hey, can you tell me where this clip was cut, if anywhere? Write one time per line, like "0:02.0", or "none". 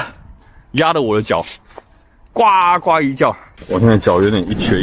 0:03.5

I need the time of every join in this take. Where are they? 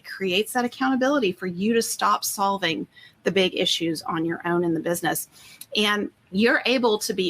0:06.2

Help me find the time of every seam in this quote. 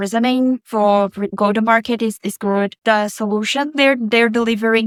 none

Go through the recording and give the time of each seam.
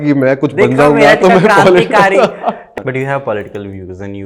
0:02.7

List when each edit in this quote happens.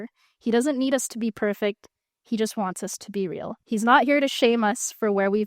0:03.6

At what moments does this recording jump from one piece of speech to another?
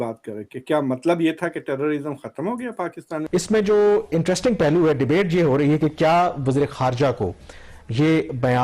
0:03.2

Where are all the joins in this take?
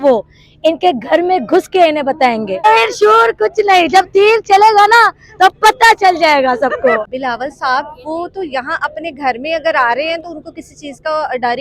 0:02.7
0:07.0

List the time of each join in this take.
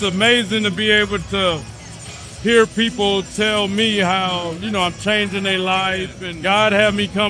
none

